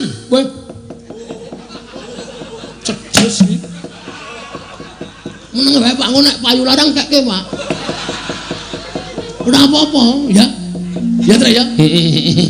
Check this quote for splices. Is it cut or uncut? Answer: uncut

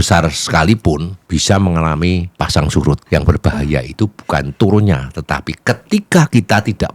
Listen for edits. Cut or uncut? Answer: cut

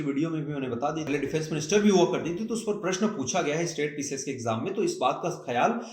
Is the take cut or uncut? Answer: cut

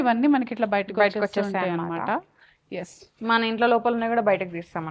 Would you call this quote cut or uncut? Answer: uncut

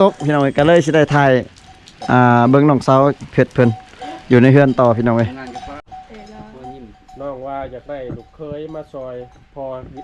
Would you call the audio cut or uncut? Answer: cut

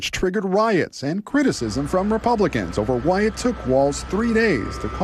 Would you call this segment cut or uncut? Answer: uncut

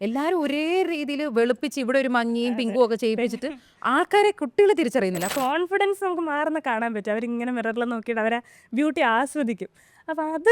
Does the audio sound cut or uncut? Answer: cut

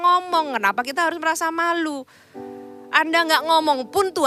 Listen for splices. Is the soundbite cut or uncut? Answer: uncut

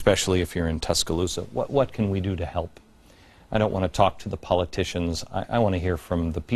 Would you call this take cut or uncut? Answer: uncut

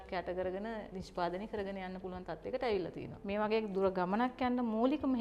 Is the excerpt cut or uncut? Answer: cut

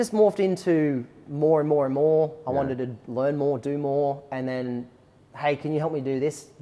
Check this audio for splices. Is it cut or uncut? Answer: uncut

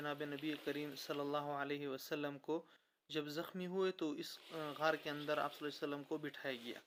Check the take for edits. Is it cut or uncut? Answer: uncut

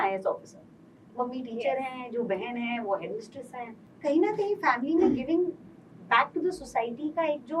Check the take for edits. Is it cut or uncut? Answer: cut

